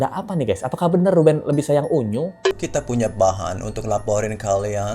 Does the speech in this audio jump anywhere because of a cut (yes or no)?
yes